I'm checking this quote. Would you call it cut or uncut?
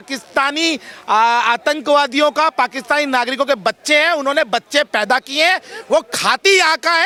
uncut